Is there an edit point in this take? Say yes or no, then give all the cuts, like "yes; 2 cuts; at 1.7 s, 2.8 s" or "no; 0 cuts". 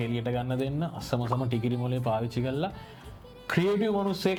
no; 0 cuts